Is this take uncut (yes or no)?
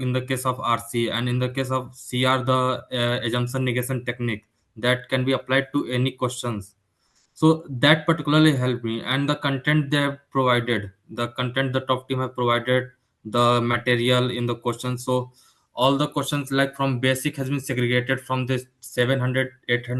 yes